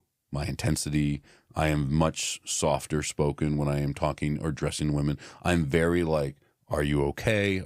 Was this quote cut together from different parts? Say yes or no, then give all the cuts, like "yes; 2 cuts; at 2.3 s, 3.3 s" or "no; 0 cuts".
no; 0 cuts